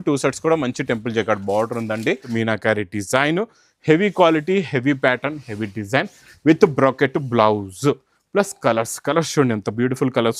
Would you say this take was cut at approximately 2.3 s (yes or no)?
yes